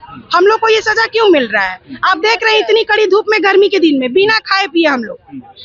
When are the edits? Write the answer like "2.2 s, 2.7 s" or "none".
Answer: none